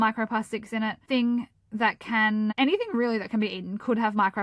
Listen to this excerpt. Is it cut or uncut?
cut